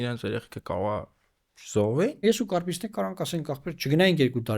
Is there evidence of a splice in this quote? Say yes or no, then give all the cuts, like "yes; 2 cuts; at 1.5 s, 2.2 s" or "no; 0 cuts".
yes; 1 cut; at 2.2 s